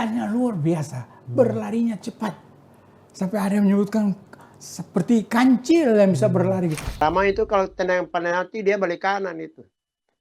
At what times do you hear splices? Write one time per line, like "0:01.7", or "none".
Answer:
0:06.9